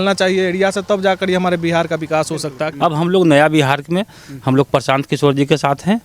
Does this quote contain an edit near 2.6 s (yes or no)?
yes